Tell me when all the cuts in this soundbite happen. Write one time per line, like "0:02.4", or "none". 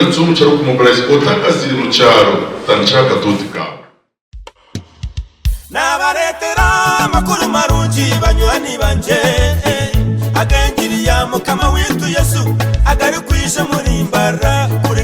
0:03.6